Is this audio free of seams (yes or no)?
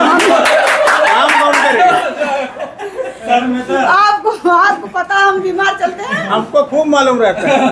yes